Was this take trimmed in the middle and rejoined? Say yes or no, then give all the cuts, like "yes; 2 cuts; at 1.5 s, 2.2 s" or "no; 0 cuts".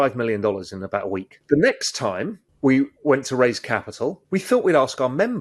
yes; 3 cuts; at 1.3 s, 2.4 s, 4.2 s